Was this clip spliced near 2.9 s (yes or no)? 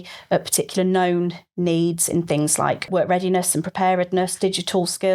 yes